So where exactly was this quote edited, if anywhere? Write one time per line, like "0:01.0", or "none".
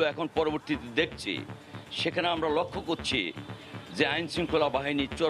none